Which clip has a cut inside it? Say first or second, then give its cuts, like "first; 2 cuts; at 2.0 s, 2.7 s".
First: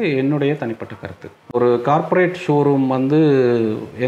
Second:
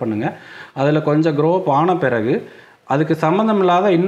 first; 1 cut; at 1.5 s